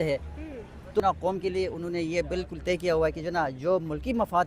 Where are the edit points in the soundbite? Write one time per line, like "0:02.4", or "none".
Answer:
0:01.0